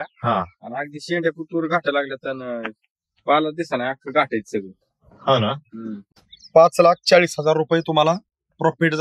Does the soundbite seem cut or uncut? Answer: cut